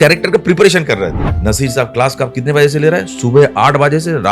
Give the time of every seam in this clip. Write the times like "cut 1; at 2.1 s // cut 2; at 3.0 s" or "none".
cut 1; at 1.3 s